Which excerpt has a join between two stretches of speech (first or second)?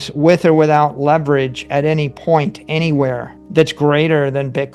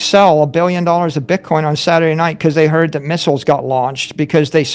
first